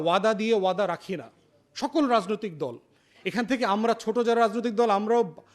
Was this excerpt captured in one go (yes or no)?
yes